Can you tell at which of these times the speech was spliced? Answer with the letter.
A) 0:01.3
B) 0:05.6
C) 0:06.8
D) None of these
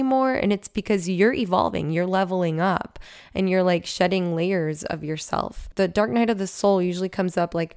B